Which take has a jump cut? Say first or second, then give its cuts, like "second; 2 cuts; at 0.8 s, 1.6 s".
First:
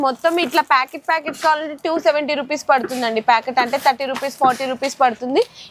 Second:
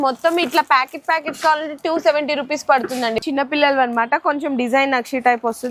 second; 1 cut; at 3.2 s